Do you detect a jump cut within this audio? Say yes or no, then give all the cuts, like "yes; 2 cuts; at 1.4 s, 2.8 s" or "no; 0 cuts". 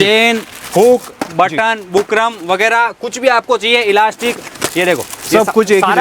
no; 0 cuts